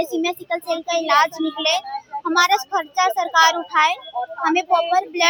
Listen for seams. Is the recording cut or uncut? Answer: uncut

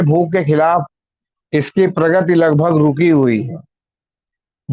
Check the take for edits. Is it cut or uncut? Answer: uncut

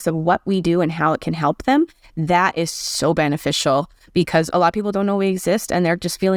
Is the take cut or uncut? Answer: uncut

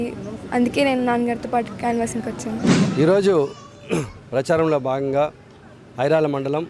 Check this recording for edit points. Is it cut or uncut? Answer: uncut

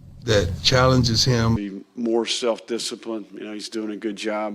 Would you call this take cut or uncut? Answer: cut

